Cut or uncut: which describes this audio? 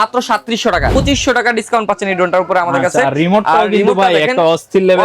cut